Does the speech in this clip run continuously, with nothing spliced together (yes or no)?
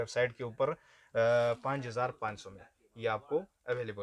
yes